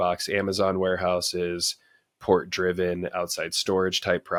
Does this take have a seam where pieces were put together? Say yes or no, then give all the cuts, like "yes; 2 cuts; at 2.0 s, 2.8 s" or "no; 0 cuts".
no; 0 cuts